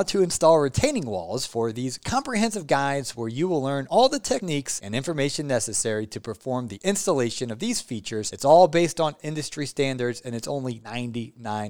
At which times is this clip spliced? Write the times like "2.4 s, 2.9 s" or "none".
none